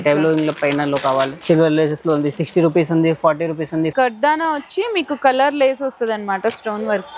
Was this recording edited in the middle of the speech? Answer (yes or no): yes